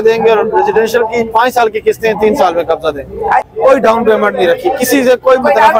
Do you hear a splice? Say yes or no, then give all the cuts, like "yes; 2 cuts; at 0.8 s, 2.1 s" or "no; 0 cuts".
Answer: yes; 1 cut; at 3.4 s